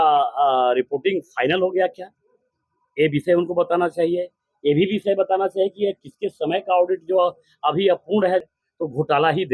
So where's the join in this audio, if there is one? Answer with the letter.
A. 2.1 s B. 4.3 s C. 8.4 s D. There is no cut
C